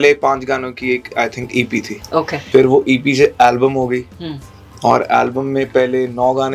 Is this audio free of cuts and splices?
yes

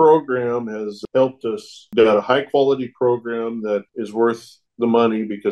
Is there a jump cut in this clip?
yes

